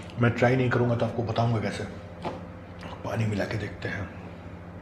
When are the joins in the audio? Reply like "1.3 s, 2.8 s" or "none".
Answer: none